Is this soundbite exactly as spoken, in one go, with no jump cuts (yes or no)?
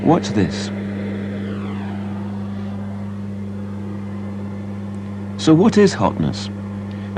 no